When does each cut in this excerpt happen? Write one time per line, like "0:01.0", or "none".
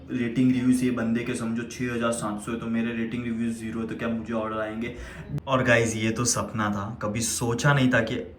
0:05.3